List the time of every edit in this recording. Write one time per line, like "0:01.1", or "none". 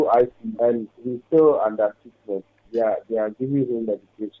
none